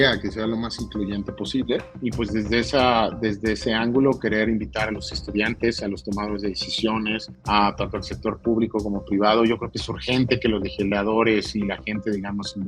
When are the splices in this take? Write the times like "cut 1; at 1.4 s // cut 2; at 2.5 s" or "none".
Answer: cut 1; at 2.0 s // cut 2; at 7.3 s

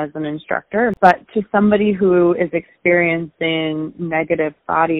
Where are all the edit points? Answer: cut 1; at 1.0 s

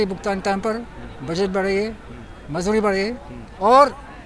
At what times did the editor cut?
none

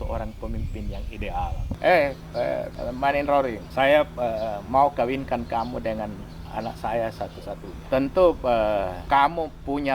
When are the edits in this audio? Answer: cut 1; at 1.6 s // cut 2; at 2.7 s // cut 3; at 3.6 s // cut 4; at 7.7 s // cut 5; at 9.0 s

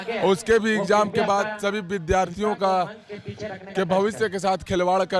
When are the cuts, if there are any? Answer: none

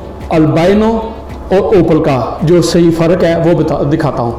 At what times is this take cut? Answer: none

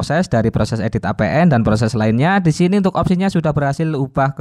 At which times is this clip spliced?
none

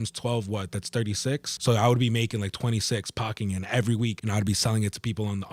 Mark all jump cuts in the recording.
cut 1; at 1.5 s // cut 2; at 4.2 s

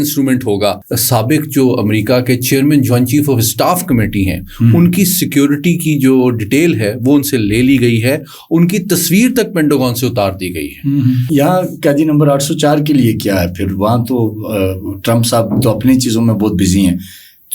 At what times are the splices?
cut 1; at 0.9 s // cut 2; at 11.3 s

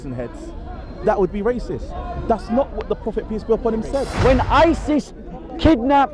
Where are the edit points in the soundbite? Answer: cut 1; at 4.0 s

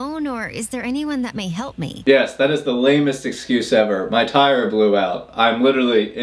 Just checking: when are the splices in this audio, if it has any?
none

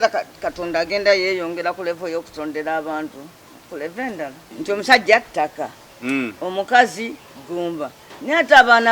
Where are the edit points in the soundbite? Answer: cut 1; at 4.4 s

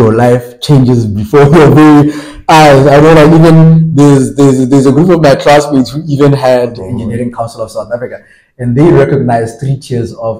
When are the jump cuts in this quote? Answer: cut 1; at 6.9 s

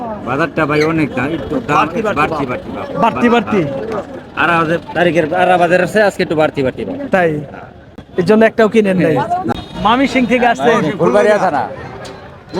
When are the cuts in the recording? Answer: cut 1; at 9.5 s

